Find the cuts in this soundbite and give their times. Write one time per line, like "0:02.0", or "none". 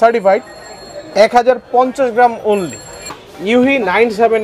0:03.1